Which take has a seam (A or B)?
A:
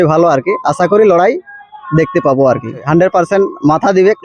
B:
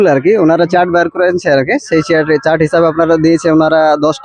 A